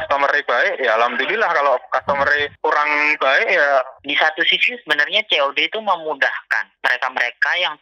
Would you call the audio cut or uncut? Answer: cut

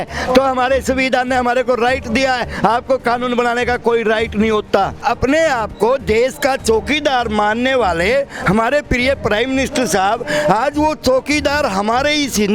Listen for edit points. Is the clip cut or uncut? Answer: cut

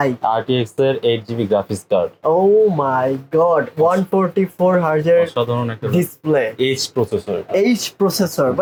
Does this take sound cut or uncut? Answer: uncut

